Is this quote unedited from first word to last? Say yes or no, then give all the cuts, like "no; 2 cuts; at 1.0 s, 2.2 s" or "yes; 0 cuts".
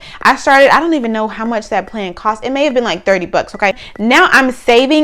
no; 1 cut; at 3.8 s